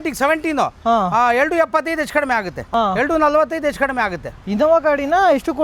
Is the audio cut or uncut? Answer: cut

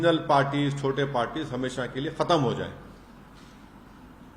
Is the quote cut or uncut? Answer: uncut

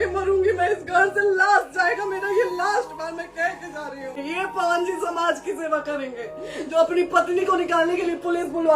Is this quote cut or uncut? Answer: cut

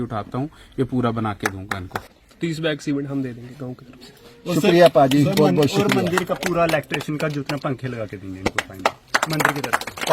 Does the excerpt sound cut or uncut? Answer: cut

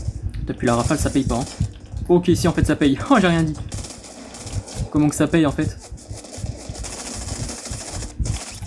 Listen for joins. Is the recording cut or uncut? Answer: uncut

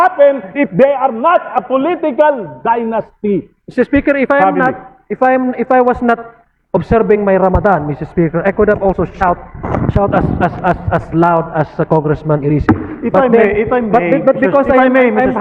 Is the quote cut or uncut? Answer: uncut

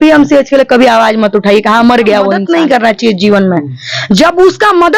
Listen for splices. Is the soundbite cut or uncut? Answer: cut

